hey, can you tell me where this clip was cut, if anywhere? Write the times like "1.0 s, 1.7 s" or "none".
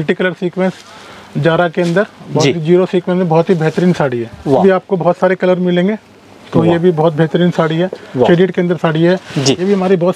4.6 s, 8.3 s